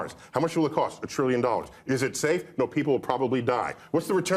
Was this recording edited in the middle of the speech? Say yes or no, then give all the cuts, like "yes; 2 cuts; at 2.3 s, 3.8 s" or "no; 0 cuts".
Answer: no; 0 cuts